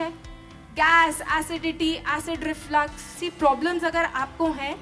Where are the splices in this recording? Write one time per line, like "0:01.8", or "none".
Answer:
0:03.0